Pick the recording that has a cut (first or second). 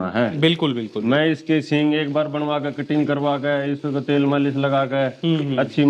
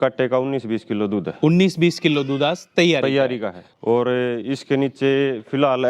second